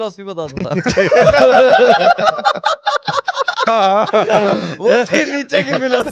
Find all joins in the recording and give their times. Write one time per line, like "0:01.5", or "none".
none